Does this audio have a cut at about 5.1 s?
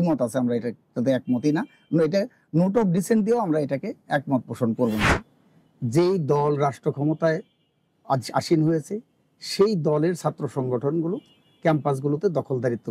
yes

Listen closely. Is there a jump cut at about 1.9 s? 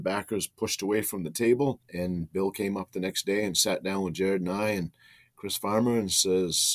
yes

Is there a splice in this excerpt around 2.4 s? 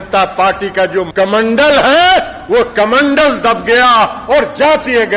no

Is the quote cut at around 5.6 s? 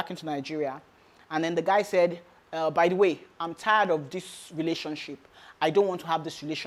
no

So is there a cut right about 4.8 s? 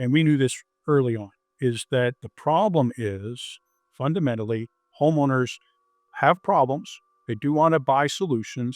no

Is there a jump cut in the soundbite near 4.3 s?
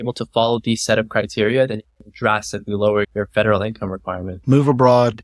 yes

